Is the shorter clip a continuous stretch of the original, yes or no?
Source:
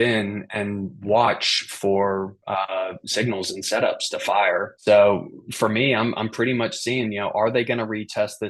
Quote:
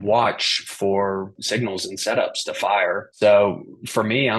no